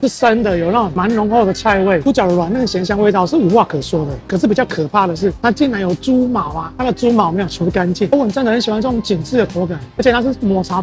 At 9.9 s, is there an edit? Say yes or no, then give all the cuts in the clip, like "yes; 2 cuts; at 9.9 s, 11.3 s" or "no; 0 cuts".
no; 2 cuts; at 2.0 s, 8.1 s